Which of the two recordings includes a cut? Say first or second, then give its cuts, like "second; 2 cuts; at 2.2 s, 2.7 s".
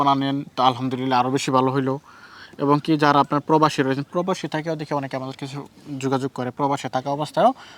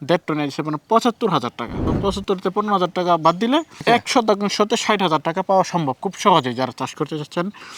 second; 2 cuts; at 1.8 s, 3.8 s